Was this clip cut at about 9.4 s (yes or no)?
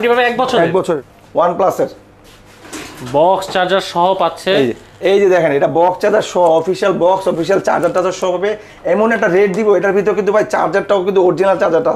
no